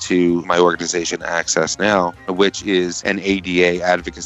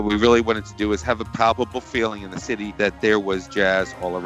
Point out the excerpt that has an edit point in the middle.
first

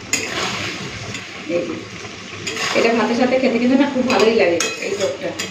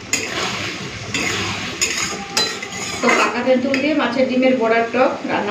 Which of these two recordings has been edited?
first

